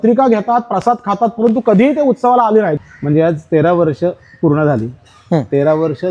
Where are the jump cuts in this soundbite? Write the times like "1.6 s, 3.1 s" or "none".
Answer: 2.8 s